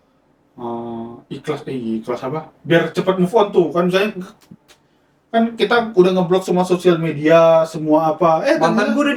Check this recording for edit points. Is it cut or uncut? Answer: uncut